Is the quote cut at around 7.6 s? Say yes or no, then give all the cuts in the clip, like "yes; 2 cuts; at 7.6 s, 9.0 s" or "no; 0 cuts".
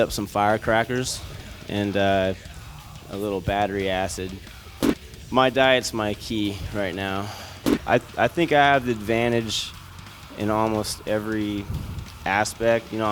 yes; 1 cut; at 7.6 s